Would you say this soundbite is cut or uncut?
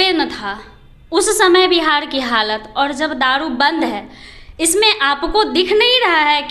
uncut